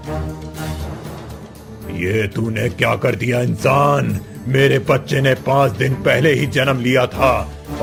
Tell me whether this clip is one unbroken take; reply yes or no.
yes